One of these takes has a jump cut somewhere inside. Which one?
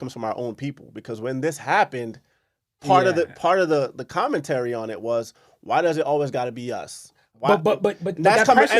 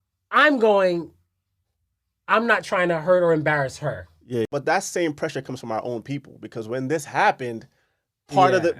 second; 1 cut; at 4.5 s

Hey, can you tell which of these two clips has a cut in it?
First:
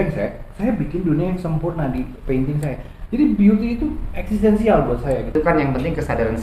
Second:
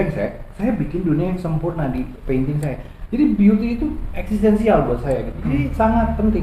first; 1 cut; at 5.3 s

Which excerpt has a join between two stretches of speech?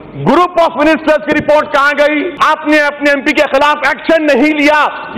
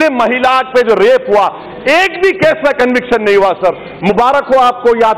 first; 1 cut; at 2.3 s

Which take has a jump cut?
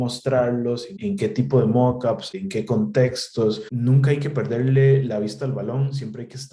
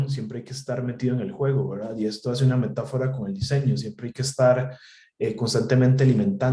first; 3 cuts; at 0.9 s, 2.3 s, 3.7 s

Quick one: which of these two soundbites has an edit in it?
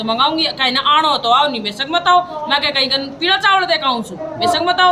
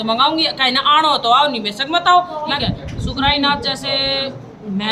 second; 1 cut; at 2.5 s

